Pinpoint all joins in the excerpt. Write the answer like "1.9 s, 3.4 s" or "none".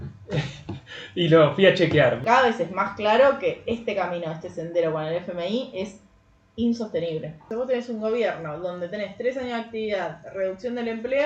2.2 s, 7.4 s